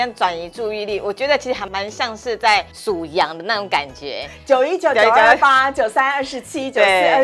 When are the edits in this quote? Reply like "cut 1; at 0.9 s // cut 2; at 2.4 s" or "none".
cut 1; at 1.6 s // cut 2; at 2.7 s